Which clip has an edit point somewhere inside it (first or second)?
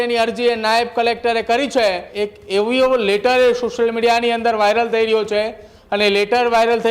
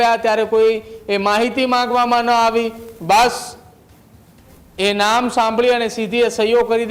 first